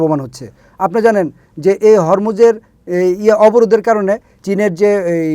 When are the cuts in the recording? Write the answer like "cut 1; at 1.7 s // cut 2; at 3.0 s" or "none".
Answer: cut 1; at 4.3 s